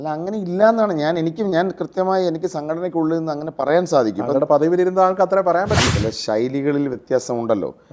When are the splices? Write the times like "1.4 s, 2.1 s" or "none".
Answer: 5.9 s